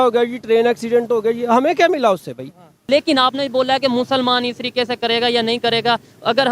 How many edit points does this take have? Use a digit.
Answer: 1